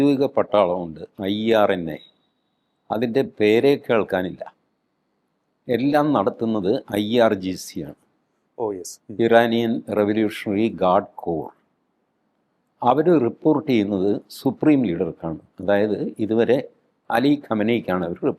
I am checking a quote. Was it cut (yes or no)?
no